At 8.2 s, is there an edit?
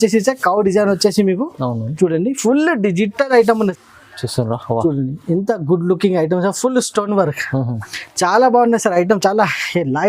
no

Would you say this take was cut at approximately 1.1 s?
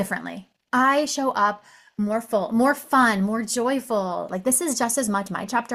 no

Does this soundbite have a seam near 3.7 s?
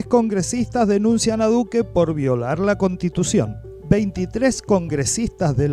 no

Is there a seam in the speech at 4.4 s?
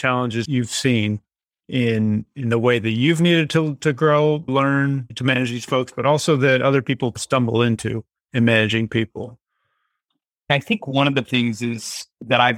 yes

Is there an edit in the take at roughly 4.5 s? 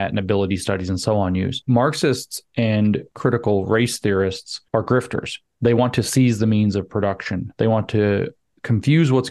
yes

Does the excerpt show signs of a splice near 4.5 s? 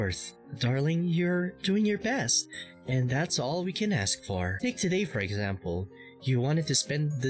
yes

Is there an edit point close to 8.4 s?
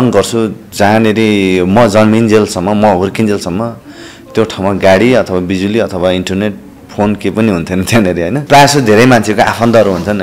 yes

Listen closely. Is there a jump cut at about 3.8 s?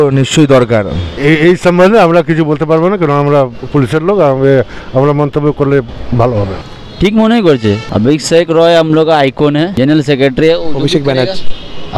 no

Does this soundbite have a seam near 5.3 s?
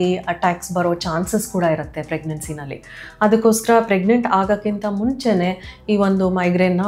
no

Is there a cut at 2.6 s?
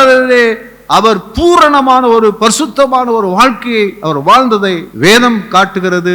no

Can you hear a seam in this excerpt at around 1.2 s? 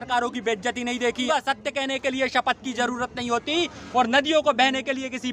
yes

